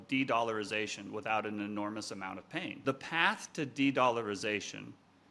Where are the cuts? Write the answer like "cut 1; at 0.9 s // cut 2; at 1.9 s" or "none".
cut 1; at 2.8 s